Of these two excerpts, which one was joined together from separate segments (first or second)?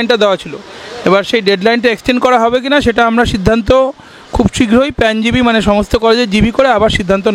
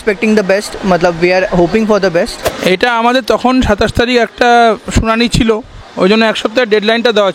second